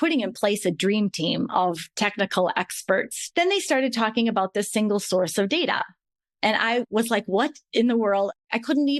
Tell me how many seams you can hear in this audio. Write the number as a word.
one